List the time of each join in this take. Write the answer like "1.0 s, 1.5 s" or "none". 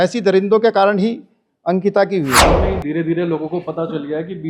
2.4 s